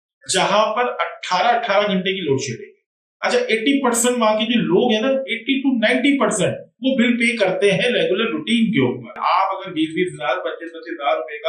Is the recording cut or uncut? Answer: cut